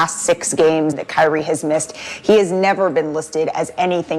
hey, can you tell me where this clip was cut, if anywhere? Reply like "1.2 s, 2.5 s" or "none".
1.0 s